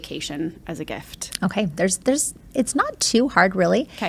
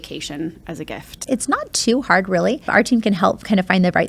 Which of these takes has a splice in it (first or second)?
second